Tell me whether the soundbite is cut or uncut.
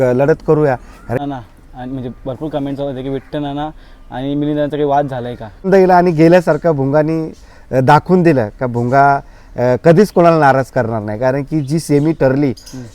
cut